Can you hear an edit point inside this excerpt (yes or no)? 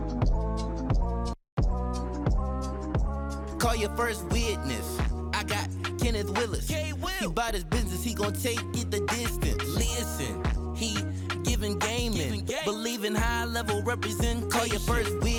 no